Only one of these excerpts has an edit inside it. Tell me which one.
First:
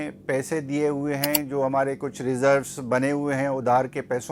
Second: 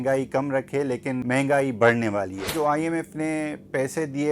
second; 2 cuts; at 1.2 s, 2.5 s

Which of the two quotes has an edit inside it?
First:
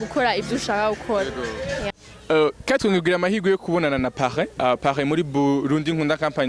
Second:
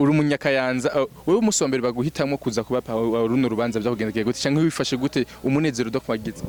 first; 1 cut; at 1.9 s

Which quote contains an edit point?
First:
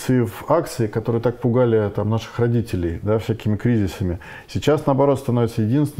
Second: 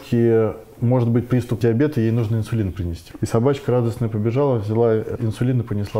second; 3 cuts; at 1.6 s, 3.0 s, 5.1 s

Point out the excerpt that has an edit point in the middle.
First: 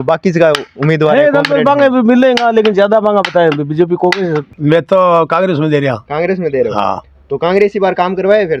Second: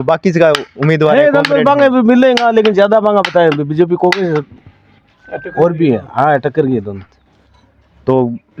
first; 1 cut; at 4.5 s

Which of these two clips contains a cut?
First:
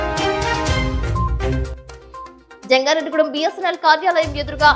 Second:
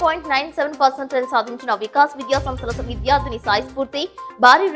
first; 1 cut; at 1.8 s

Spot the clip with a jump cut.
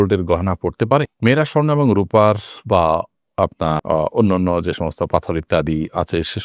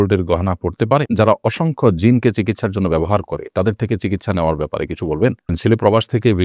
second; 2 cuts; at 1.1 s, 5.5 s

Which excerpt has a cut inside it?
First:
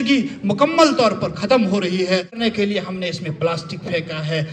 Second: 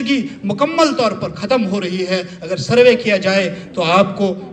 first; 1 cut; at 2.4 s

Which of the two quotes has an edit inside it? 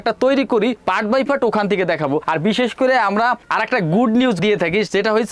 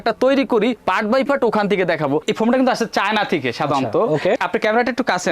second; 1 cut; at 2.2 s

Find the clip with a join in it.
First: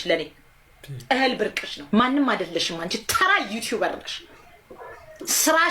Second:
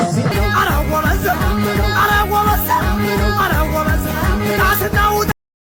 first; 1 cut; at 1.7 s

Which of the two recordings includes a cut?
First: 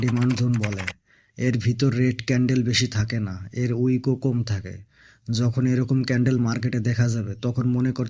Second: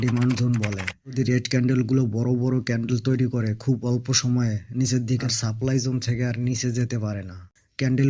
second; 2 cuts; at 1.1 s, 5.2 s

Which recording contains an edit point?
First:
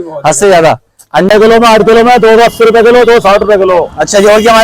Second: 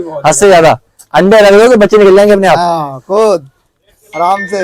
first; 1 cut; at 1.3 s

